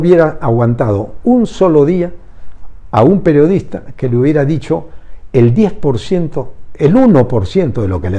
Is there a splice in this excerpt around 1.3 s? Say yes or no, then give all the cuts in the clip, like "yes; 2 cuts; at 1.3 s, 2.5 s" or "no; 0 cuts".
no; 0 cuts